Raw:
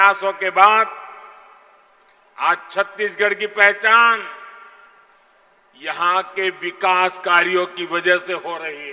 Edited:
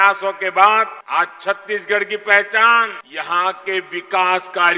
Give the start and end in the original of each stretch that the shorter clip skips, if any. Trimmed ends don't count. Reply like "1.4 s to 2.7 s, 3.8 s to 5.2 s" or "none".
1.0 s to 2.3 s, 4.3 s to 5.7 s